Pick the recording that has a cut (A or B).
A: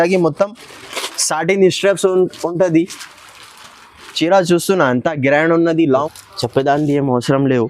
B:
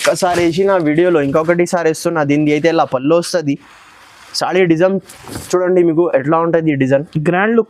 A